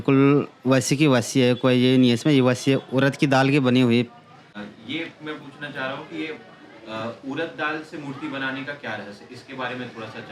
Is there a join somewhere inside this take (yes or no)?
no